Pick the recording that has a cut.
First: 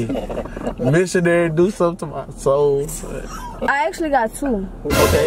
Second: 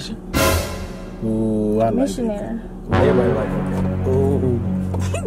first; 1 cut; at 3.7 s

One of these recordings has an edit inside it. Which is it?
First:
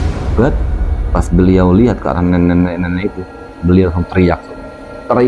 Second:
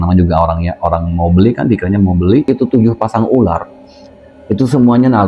second; 1 cut; at 2.5 s

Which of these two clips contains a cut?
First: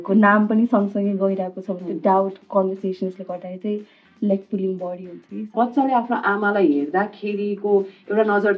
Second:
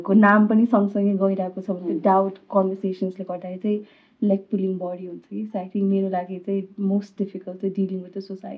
first; 1 cut; at 5.5 s

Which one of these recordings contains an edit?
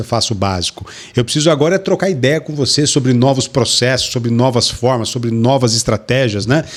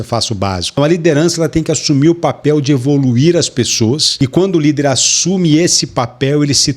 second; 2 cuts; at 0.8 s, 4.1 s

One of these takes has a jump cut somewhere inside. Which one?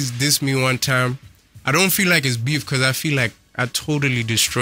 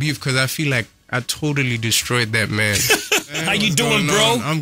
second; 1 cut; at 3.4 s

